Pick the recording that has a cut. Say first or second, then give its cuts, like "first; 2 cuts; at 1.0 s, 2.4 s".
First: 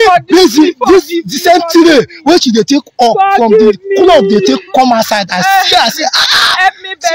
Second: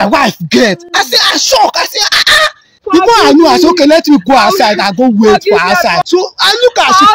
second; 2 cuts; at 2.7 s, 6.0 s